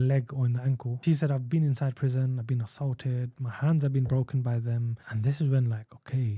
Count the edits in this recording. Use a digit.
2